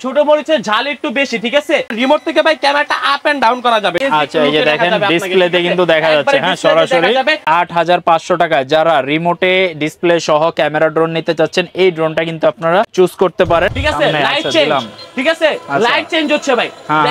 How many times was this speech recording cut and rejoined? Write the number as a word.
five